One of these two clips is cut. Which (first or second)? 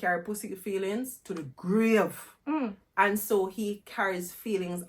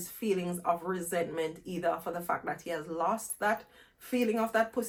first